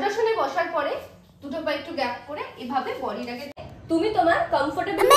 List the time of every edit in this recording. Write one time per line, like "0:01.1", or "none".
0:03.6